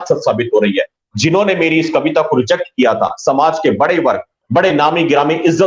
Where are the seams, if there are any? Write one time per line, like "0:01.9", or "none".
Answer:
none